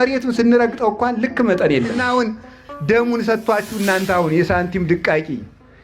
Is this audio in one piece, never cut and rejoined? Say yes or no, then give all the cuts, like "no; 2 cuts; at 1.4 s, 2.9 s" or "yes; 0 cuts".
no; 1 cut; at 2.0 s